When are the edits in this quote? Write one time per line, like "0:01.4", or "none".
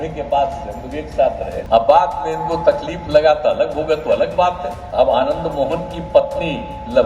0:01.6
0:04.8